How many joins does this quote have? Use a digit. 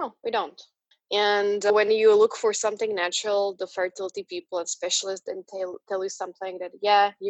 1